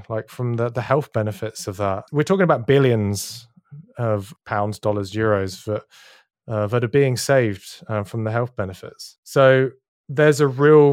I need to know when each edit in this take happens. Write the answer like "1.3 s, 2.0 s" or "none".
2.0 s